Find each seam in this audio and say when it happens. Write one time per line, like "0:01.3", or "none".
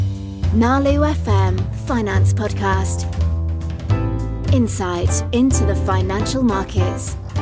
none